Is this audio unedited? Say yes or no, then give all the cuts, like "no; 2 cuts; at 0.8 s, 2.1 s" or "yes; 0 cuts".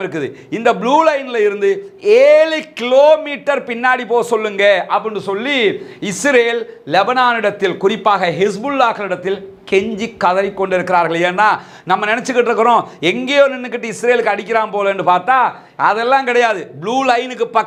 yes; 0 cuts